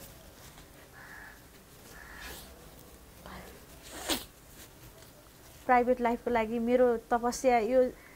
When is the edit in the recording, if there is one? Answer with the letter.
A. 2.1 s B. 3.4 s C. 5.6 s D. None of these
C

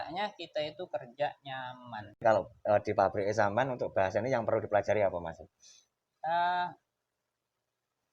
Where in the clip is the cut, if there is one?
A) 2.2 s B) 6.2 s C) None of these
A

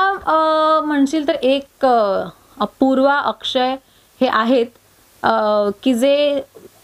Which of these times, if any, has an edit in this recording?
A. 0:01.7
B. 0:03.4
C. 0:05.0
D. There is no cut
D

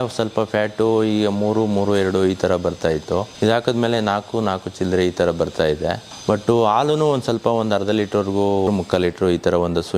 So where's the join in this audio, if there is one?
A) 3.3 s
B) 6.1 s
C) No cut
A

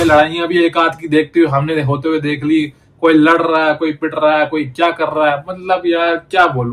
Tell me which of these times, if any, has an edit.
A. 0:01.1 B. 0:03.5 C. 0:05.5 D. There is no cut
D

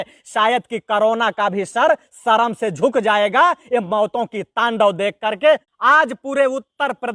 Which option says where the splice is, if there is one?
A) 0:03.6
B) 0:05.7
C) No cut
B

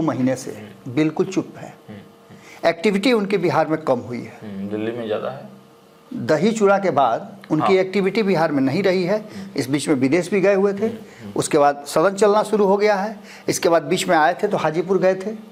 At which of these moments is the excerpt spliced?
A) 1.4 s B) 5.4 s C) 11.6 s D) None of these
D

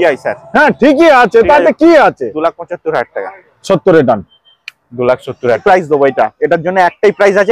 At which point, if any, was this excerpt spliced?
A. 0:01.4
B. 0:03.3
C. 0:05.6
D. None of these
C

